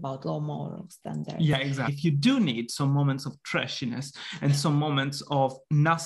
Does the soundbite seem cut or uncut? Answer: cut